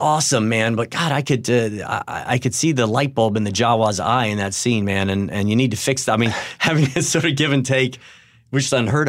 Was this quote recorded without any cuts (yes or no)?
yes